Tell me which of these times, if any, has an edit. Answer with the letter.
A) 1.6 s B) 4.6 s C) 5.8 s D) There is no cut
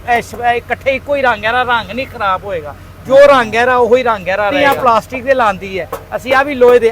B